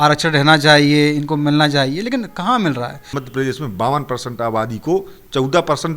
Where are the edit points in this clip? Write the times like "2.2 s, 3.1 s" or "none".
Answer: 3.2 s